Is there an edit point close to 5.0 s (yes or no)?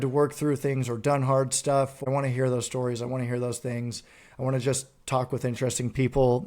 no